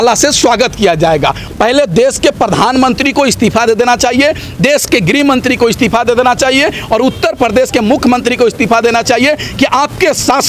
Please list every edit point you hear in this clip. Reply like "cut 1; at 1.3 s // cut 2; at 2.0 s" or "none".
cut 1; at 1.4 s